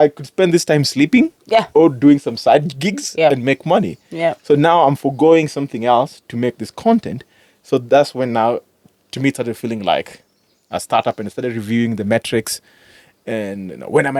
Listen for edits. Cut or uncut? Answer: uncut